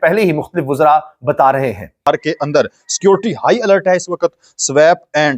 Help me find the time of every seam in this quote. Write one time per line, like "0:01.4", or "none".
0:02.0